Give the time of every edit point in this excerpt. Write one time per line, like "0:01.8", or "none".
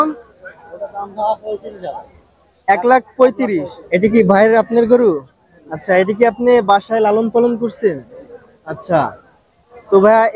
0:03.7